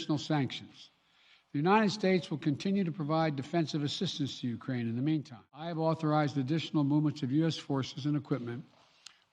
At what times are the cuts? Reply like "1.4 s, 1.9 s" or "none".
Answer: 5.7 s